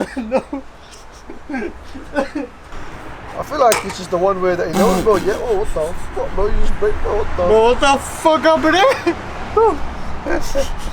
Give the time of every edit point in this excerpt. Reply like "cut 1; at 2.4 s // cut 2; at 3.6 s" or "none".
cut 1; at 2.8 s